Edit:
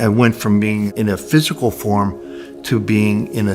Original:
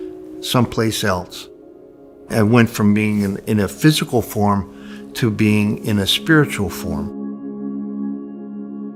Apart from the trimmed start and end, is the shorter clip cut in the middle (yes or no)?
yes